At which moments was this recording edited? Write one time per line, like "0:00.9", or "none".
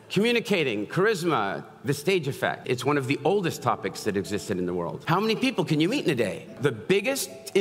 0:02.6
0:05.0
0:06.6